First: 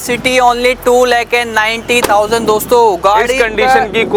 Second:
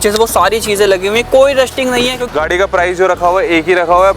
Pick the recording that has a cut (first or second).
second